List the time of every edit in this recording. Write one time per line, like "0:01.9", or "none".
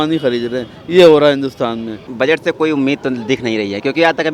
0:02.1

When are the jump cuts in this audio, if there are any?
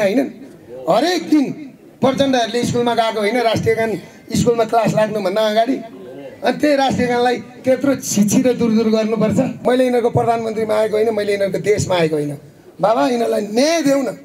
0:09.6

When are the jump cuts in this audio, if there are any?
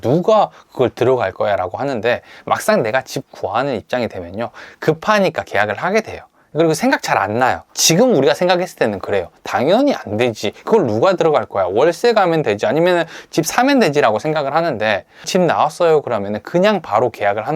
0:07.8
0:15.3

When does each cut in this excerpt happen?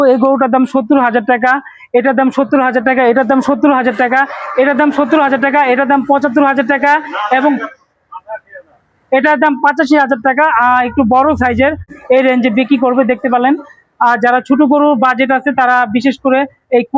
0:11.9

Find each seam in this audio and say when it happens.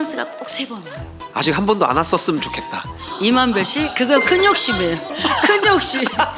0:01.2

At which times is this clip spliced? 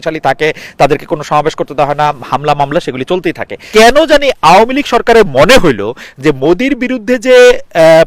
0:03.5

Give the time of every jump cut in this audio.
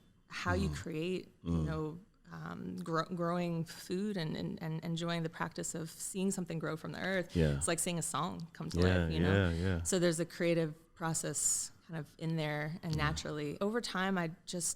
0:13.6

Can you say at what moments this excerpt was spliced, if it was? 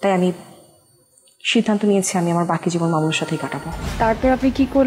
0:03.8

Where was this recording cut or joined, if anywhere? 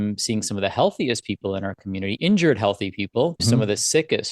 0:03.4

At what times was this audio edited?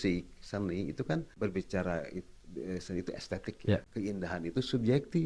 0:01.3
0:03.9

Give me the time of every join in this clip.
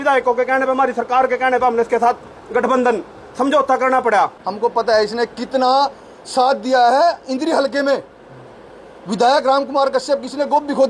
0:04.4

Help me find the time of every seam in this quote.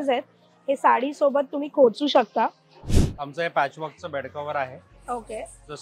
0:02.9

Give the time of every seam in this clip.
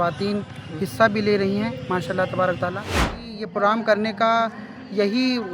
0:03.2

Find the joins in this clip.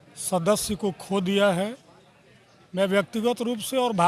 none

